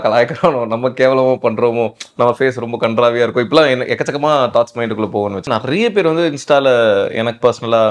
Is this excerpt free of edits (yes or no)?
no